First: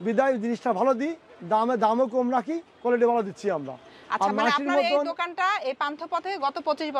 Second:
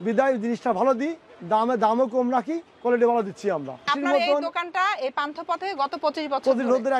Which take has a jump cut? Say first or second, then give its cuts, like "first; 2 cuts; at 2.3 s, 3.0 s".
second; 1 cut; at 3.9 s